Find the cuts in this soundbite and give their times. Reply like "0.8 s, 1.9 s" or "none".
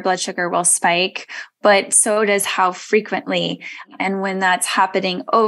3.9 s

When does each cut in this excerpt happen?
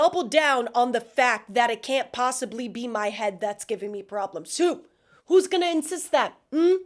none

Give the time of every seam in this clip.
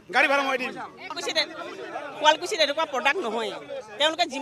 1.1 s

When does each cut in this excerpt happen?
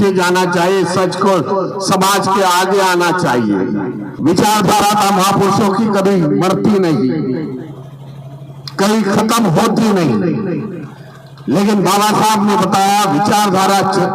4.1 s

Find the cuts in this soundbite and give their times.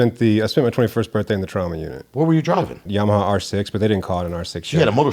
2.8 s

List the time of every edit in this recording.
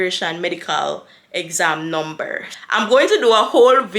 2.5 s

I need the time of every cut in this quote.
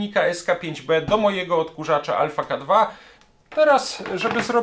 3.1 s

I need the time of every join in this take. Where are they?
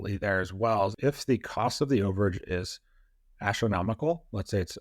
1.0 s

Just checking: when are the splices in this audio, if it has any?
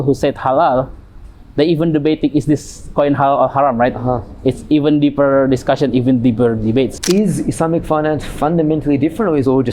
7.0 s

